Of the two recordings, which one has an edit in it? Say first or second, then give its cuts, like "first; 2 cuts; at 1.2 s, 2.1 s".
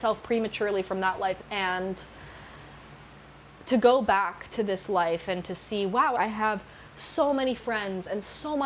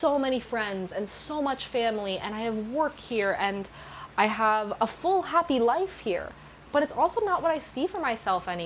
first; 2 cuts; at 1.4 s, 6.2 s